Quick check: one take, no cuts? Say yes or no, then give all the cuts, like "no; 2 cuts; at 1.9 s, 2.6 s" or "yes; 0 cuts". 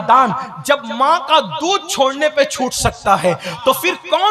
yes; 0 cuts